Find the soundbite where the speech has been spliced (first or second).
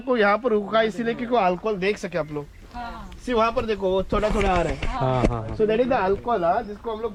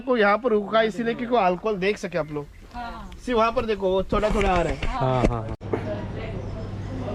second